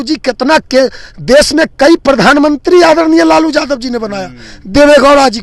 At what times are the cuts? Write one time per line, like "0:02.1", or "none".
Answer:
none